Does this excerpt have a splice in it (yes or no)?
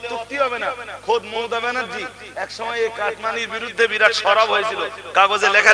no